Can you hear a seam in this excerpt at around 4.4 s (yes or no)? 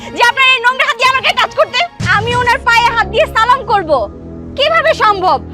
no